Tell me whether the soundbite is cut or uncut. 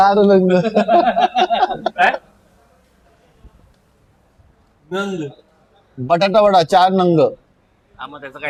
uncut